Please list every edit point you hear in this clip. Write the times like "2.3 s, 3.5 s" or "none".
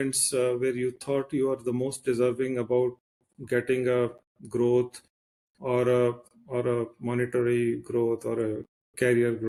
none

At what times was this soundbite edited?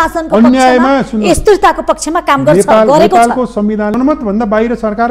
4.0 s

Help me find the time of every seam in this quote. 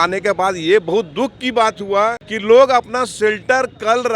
2.3 s

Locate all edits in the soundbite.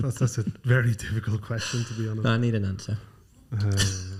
none

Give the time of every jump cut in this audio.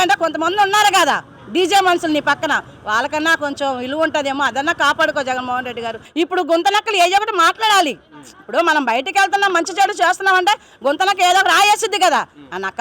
6.0 s

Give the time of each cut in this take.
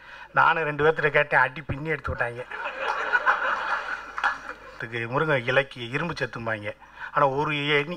4.9 s

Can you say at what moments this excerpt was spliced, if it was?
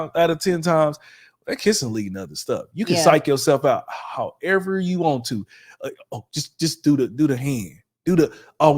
none

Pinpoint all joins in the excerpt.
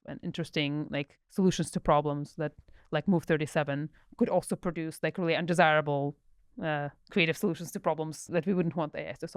8.2 s

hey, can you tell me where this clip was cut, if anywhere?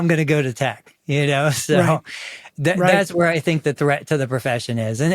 none

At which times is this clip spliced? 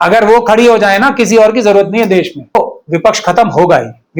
2.6 s

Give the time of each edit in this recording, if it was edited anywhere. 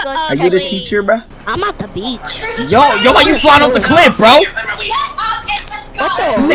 1.3 s

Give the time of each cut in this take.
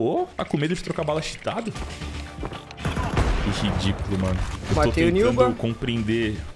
1.7 s, 4.5 s

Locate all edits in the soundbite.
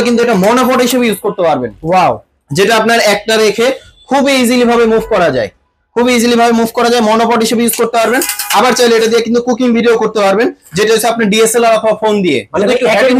none

